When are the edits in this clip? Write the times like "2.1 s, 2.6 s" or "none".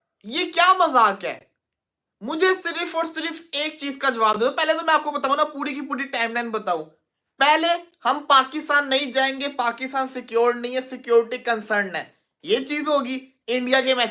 none